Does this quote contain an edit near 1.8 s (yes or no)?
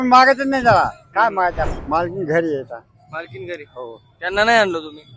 yes